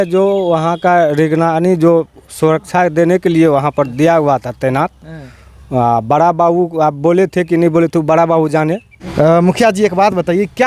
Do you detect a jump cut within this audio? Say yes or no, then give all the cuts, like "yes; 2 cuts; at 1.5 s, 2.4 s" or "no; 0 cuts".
yes; 1 cut; at 9.0 s